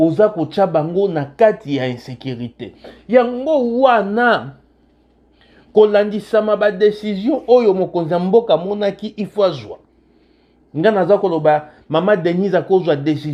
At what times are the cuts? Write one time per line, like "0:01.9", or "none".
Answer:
none